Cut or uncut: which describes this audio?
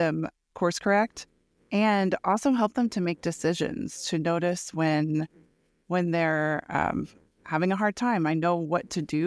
uncut